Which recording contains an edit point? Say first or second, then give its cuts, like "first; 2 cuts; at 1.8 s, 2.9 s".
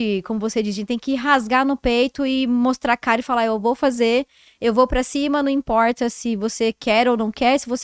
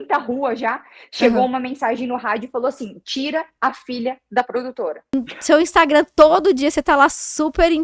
second; 1 cut; at 5.3 s